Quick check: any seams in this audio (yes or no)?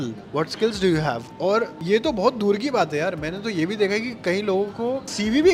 no